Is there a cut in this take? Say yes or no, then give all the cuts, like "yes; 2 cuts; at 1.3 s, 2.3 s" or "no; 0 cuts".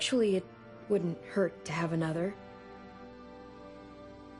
yes; 1 cut; at 2.4 s